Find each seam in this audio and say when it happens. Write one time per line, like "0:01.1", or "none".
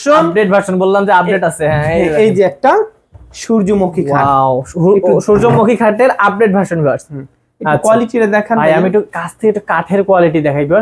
none

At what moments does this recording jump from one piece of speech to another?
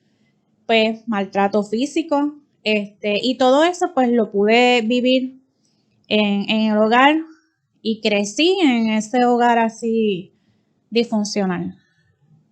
none

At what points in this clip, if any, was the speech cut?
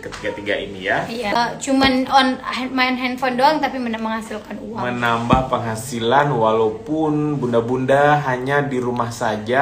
0:01.3

